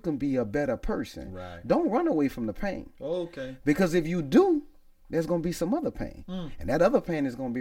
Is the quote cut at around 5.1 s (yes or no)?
no